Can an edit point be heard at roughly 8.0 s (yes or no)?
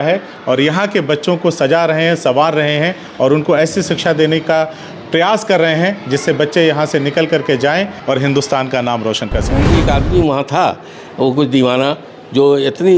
yes